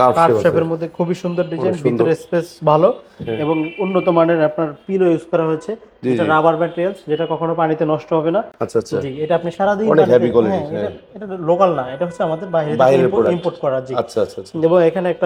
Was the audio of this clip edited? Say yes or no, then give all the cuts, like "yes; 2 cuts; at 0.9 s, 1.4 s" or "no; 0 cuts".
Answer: no; 0 cuts